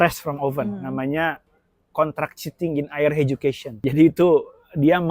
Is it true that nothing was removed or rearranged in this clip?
no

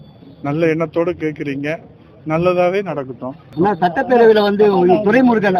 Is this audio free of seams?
yes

